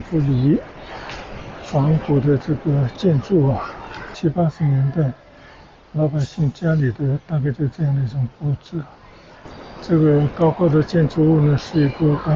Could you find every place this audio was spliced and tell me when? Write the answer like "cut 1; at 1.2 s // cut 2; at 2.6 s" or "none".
cut 1; at 4.1 s // cut 2; at 9.5 s